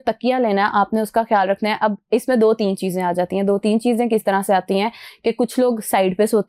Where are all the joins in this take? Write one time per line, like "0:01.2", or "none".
none

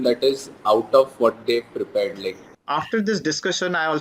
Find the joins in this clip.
0:02.6

